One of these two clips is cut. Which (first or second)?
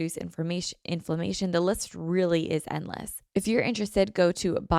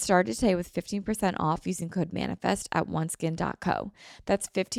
first